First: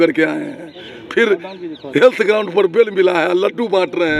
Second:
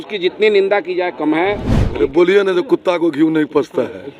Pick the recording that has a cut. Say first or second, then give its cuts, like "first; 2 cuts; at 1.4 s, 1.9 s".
second; 1 cut; at 1.8 s